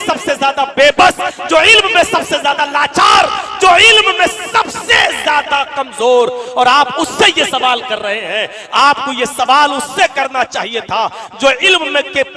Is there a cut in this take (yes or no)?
no